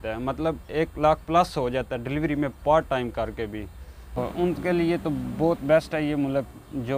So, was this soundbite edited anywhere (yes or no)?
yes